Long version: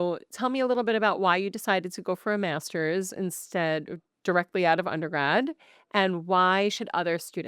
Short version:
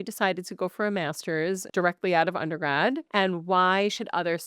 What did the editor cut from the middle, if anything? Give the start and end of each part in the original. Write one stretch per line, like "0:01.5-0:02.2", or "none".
0:03.1-0:04.2
0:05.6-0:05.8